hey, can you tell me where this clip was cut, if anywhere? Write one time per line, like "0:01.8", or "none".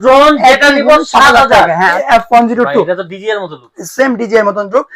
0:02.0